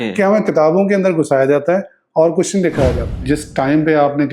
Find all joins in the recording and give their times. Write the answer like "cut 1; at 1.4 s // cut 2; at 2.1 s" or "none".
cut 1; at 3.2 s